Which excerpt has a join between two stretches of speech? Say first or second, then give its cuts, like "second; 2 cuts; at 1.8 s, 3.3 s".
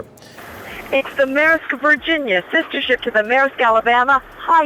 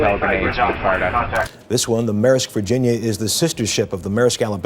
second; 1 cut; at 1.5 s